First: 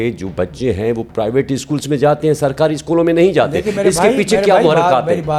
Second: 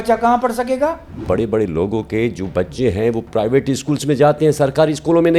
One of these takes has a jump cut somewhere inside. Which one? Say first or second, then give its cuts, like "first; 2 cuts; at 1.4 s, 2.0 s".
second; 1 cut; at 1.2 s